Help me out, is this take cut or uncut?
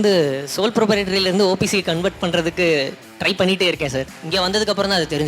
cut